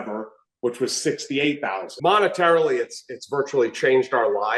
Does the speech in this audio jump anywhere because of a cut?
yes; 1 cut; at 1.9 s

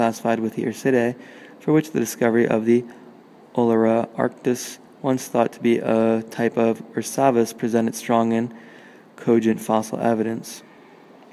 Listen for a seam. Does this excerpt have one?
no; 0 cuts

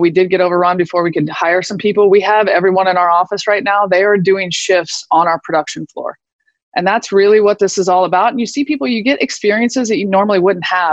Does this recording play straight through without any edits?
yes; 0 cuts

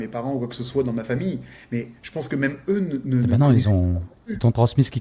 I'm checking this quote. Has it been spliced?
no; 0 cuts

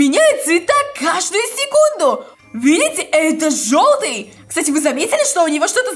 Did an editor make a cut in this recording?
yes; 2 cuts; at 2.3 s, 4.3 s

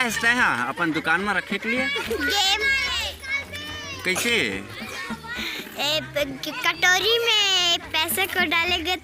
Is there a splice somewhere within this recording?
no; 0 cuts

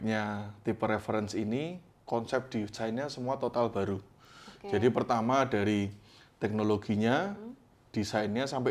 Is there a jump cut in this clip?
no; 0 cuts

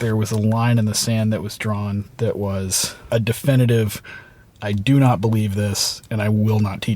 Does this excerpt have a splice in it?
no; 0 cuts

